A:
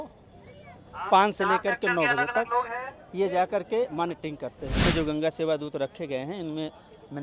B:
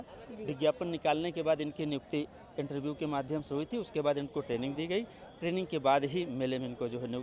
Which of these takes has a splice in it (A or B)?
A